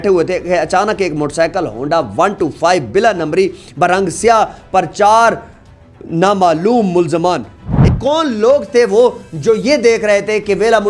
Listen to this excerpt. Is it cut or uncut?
cut